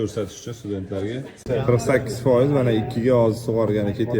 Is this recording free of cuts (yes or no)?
no